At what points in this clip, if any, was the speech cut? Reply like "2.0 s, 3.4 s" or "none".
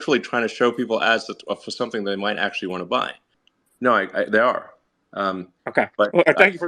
3.3 s

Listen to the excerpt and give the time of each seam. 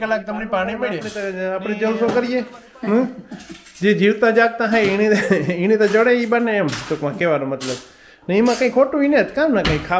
1.1 s

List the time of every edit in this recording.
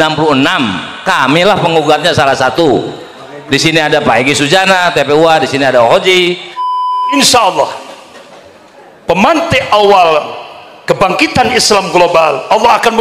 6.7 s

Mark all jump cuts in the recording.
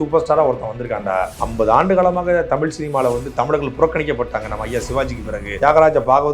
1.4 s, 5.5 s

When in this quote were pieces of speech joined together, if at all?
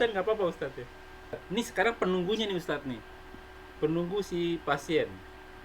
1.4 s

